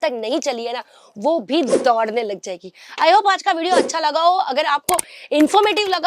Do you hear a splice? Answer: no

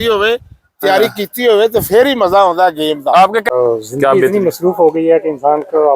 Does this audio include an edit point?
yes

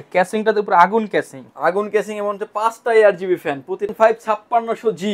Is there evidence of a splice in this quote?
yes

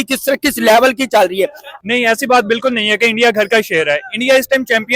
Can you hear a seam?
yes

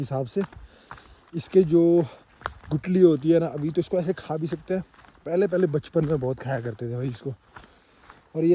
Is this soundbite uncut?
yes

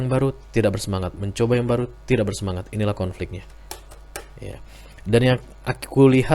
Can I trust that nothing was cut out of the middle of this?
yes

